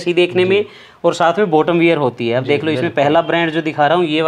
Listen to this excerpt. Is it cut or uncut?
uncut